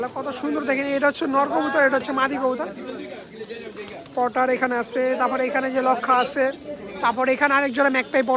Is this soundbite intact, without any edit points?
yes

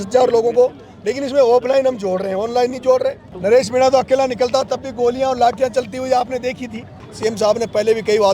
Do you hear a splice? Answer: yes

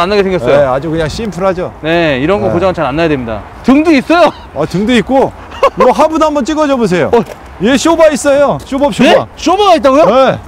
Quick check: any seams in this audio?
no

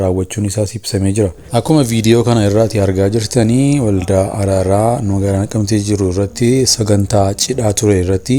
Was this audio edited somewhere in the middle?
yes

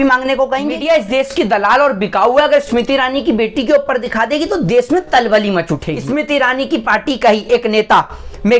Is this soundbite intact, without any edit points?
no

